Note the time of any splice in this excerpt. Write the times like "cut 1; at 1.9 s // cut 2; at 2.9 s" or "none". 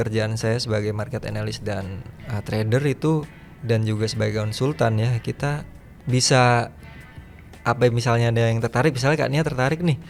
none